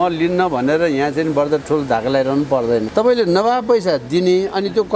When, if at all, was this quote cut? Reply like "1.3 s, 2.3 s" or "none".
2.9 s